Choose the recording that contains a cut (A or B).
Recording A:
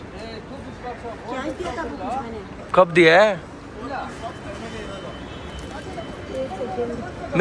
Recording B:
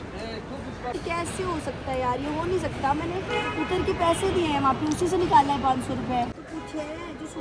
B